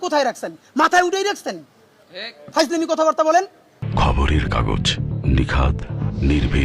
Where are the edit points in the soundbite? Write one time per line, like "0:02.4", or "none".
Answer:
none